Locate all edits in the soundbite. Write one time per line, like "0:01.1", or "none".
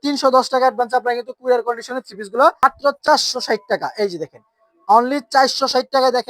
0:02.6